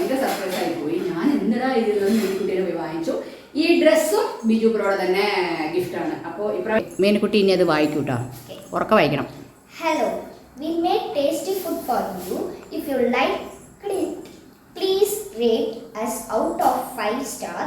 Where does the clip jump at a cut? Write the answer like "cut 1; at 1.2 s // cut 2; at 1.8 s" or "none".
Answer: cut 1; at 6.8 s